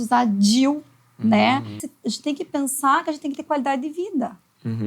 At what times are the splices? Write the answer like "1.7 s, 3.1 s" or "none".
1.8 s